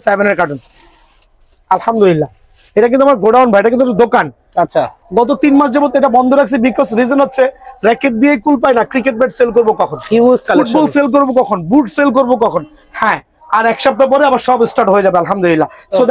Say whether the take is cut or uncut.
uncut